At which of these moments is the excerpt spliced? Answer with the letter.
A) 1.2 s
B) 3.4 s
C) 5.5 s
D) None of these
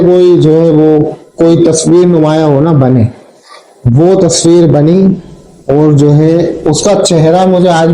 D